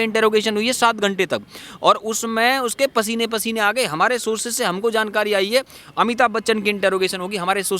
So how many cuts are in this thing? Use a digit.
1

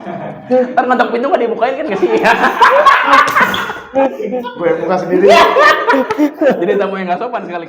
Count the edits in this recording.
0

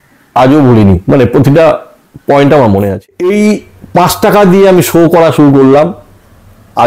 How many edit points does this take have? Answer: 1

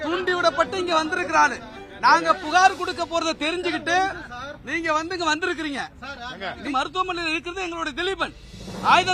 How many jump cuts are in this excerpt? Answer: 1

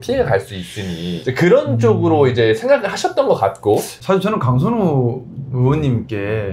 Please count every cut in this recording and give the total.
1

